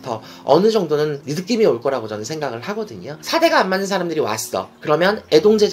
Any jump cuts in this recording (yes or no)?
yes